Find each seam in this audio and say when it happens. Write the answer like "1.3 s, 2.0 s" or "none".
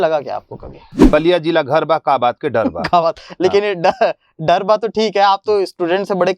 0.9 s